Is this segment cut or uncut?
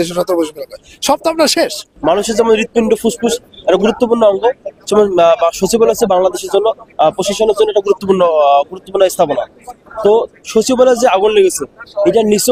uncut